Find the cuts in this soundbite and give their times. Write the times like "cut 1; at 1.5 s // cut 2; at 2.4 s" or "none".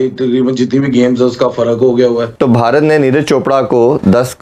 cut 1; at 2.3 s